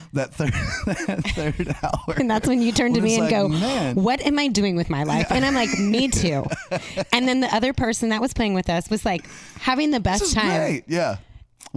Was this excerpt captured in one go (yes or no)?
yes